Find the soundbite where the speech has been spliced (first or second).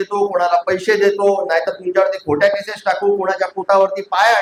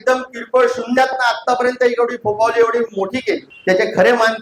second